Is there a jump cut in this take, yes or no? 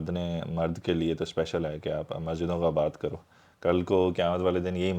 no